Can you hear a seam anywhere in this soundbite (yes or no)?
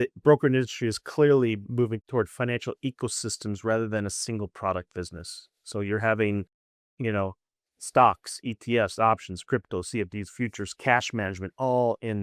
no